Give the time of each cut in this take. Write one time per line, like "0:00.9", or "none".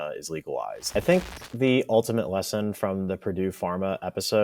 0:00.9

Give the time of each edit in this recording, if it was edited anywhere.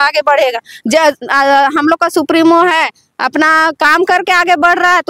none

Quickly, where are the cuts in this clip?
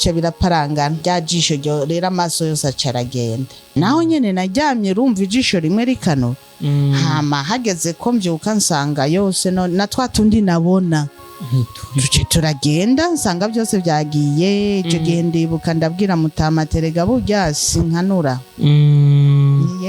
0:01.0
0:03.7

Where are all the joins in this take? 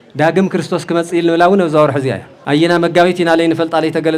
0:02.3

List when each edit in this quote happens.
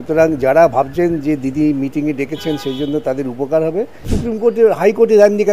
0:04.1

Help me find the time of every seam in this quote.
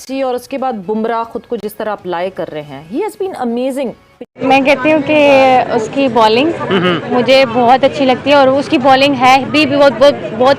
0:04.2

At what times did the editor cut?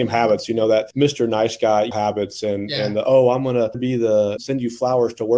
0:00.9
0:01.9
0:04.1

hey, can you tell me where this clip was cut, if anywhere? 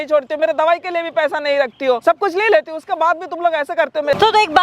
0:02.0

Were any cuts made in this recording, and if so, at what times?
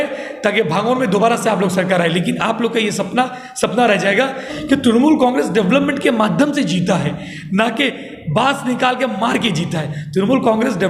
0:04.5

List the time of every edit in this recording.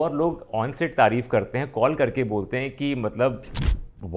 none

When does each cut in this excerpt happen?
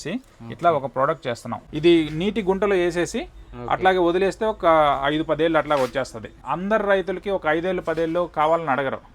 0:01.6
0:06.4

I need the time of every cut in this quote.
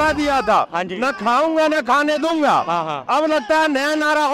none

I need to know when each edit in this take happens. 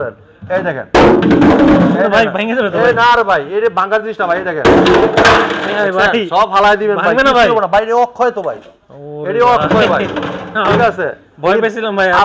none

